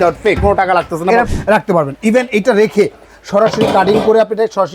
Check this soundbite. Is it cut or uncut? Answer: cut